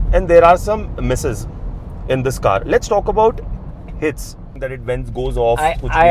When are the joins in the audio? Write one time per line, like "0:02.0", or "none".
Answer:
0:04.6